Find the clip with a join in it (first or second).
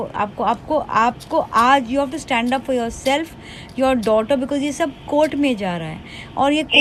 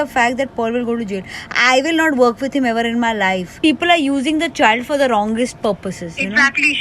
second